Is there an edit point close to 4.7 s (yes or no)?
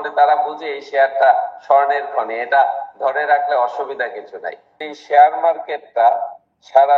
yes